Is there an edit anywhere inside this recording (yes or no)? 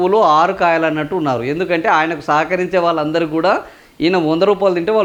no